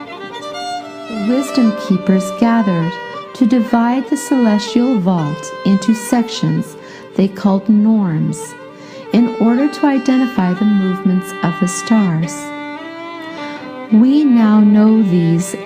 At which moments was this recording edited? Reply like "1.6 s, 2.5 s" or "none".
1.2 s